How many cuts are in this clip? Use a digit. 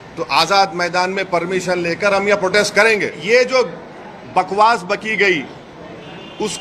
1